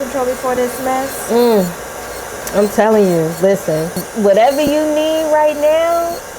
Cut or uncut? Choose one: cut